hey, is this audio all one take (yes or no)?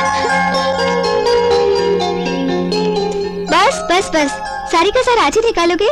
yes